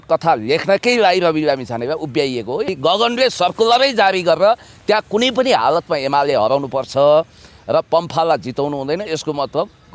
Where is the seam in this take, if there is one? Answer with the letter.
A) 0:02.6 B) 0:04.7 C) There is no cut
A